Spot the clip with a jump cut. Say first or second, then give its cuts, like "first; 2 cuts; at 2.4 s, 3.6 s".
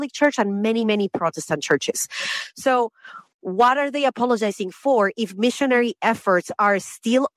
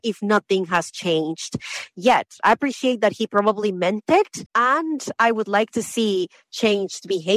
second; 1 cut; at 4.4 s